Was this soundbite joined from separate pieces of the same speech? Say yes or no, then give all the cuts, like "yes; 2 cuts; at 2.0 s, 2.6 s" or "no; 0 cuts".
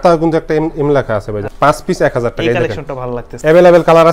yes; 2 cuts; at 1.5 s, 3.3 s